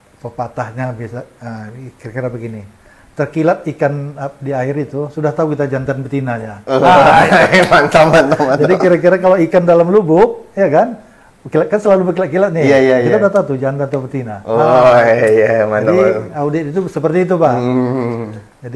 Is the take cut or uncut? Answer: uncut